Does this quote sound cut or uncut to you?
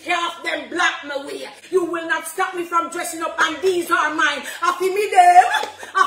cut